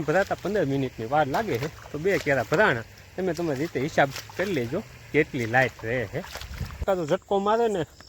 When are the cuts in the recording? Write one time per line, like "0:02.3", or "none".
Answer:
0:06.8